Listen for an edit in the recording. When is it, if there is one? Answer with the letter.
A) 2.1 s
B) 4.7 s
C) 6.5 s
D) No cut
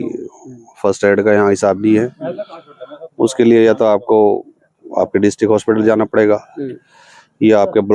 D